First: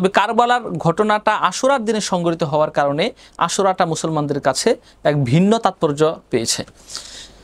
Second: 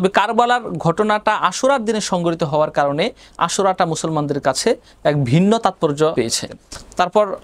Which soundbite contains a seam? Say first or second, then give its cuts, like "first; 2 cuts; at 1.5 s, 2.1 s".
second; 1 cut; at 6.3 s